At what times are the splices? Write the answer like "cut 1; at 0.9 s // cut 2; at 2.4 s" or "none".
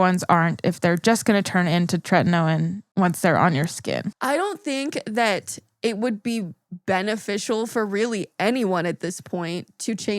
cut 1; at 2.8 s // cut 2; at 4.1 s